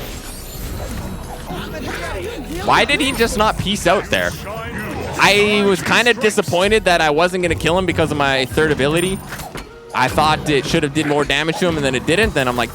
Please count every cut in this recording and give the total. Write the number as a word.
zero